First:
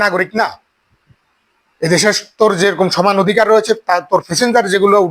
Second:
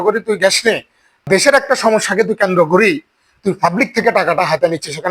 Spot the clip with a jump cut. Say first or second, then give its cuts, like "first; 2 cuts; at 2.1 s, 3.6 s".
second; 1 cut; at 1.2 s